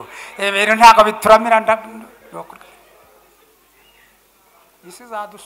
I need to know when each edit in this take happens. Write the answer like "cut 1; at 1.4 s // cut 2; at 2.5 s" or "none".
none